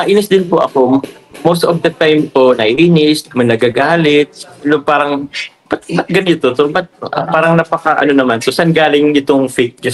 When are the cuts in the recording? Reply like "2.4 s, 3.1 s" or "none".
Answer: none